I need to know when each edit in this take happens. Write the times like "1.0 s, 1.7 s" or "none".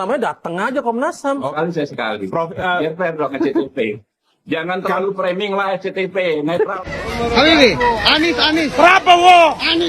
1.5 s, 7.0 s

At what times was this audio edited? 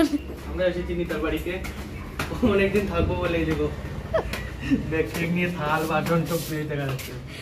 none

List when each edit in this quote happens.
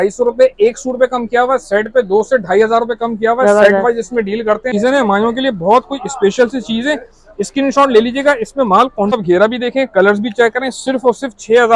4.7 s, 9.1 s

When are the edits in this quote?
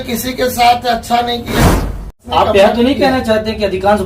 1.9 s

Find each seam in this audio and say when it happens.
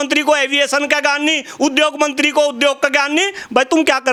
none

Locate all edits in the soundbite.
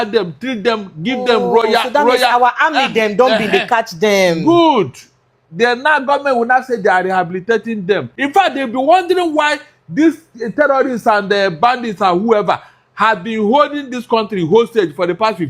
8.1 s

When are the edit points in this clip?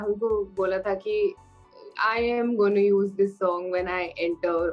none

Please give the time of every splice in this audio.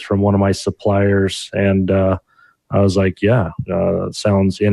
none

